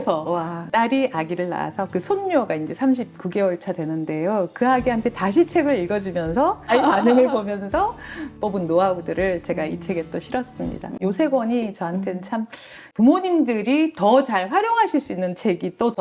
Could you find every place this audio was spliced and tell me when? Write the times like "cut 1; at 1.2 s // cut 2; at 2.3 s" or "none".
none

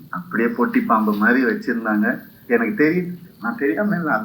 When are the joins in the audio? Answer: none

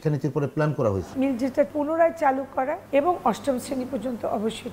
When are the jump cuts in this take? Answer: cut 1; at 1.6 s // cut 2; at 2.8 s

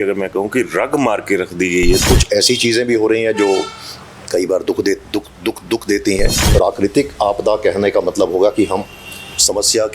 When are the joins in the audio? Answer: cut 1; at 2.0 s // cut 2; at 6.4 s

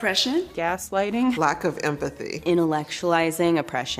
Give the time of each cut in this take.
none

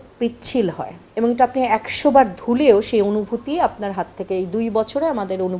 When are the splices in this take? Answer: none

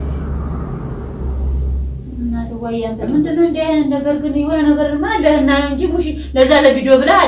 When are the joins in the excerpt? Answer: none

